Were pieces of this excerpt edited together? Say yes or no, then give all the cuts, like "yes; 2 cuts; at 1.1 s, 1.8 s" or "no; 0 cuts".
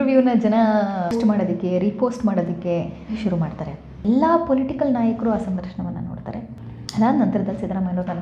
yes; 2 cuts; at 1.1 s, 4.0 s